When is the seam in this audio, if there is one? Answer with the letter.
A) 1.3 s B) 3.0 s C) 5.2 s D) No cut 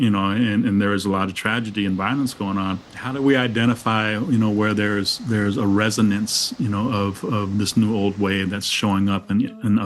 B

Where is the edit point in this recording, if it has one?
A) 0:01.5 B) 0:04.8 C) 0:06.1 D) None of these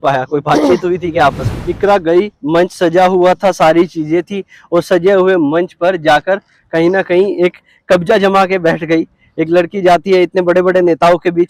A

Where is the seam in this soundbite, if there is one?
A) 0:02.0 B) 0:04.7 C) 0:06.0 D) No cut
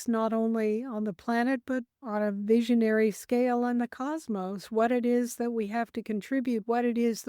A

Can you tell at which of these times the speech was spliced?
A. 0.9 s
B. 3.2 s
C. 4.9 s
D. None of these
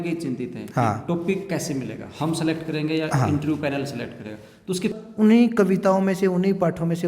C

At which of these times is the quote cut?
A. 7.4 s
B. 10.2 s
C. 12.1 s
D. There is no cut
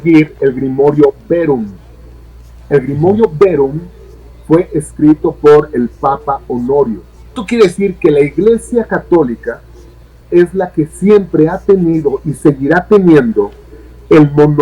A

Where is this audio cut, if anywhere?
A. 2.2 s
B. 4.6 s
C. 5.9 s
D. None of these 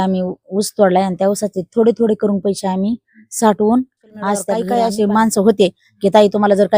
B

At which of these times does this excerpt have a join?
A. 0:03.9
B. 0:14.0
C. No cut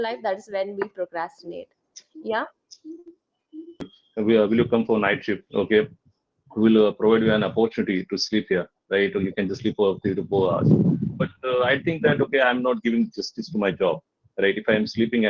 A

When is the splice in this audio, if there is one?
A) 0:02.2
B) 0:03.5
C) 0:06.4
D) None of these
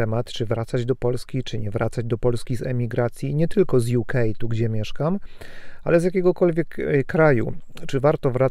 D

